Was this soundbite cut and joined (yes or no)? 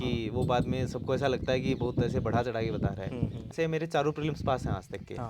yes